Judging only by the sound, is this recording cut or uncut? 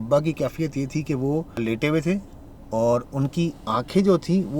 cut